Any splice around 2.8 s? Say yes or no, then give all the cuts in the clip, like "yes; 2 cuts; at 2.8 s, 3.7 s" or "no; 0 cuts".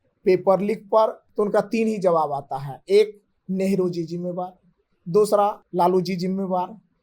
no; 2 cuts; at 1.2 s, 5.6 s